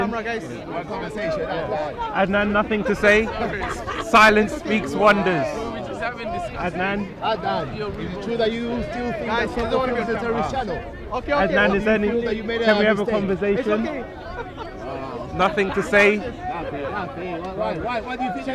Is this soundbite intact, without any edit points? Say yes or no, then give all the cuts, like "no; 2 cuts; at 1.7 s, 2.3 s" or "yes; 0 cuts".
yes; 0 cuts